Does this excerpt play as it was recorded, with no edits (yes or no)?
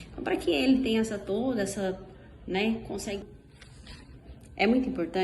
no